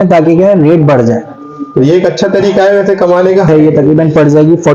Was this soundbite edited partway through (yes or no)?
yes